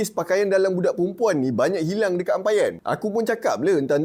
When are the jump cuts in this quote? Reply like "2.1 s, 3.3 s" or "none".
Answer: none